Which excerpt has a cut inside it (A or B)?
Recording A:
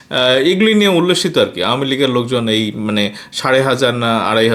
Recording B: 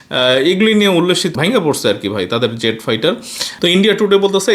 B